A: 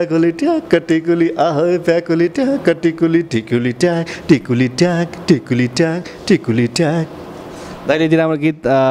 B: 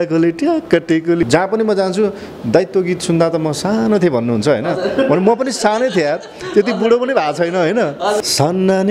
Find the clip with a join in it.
B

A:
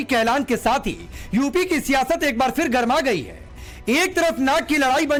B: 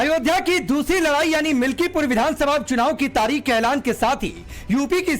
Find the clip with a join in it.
B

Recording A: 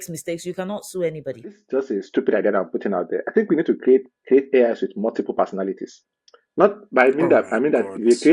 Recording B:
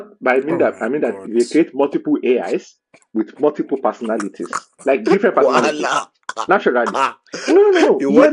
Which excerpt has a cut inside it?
A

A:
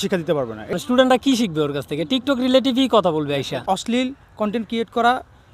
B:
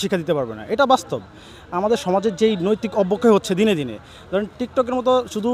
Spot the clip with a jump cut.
A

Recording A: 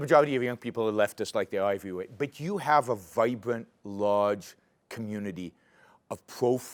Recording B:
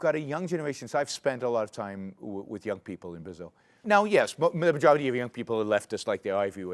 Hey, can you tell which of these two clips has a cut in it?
B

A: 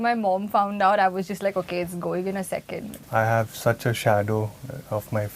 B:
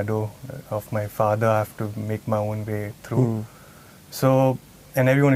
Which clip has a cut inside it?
A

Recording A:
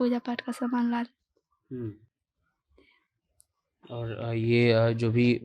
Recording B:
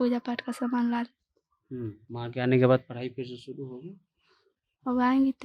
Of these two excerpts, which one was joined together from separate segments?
B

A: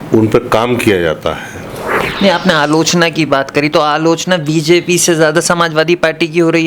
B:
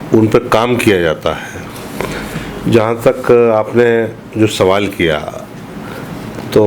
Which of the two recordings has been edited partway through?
A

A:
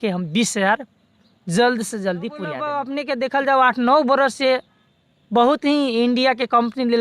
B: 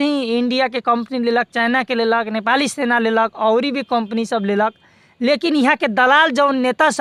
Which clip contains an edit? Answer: A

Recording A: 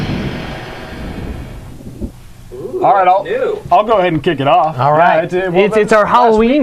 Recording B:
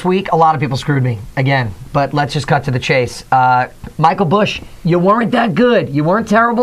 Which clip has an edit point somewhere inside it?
B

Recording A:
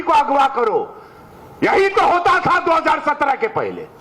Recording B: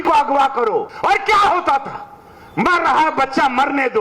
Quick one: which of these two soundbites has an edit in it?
B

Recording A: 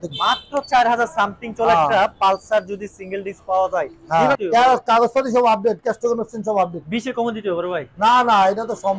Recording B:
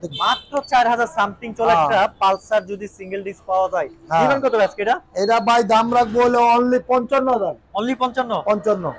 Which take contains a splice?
A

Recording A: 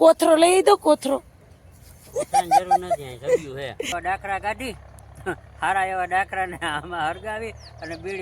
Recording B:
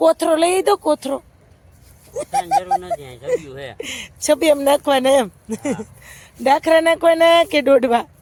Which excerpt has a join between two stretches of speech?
A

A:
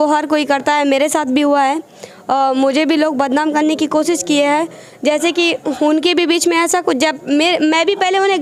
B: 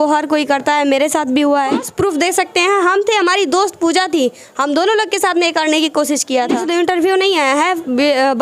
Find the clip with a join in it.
B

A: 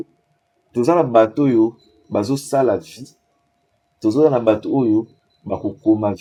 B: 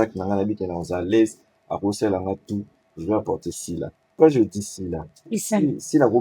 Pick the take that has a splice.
B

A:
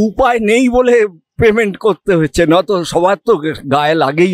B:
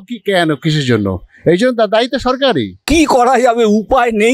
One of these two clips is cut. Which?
B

